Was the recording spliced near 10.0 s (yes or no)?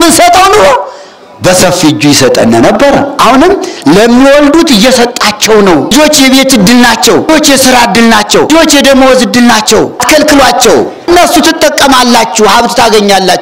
yes